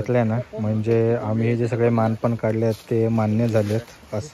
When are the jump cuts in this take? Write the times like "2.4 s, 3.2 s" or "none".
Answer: none